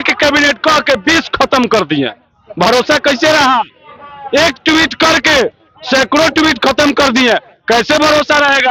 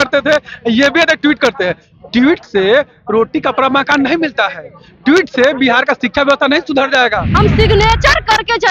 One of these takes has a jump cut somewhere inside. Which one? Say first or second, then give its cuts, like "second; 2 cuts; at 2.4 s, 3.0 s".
second; 1 cut; at 7.2 s